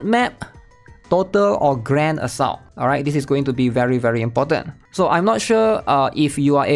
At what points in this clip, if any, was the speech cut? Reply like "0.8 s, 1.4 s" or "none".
2.7 s, 4.8 s